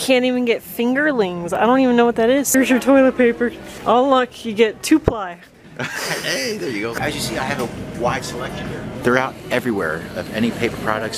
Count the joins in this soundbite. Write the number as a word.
four